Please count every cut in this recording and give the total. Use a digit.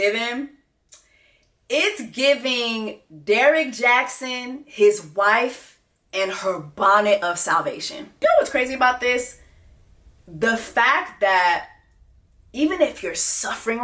0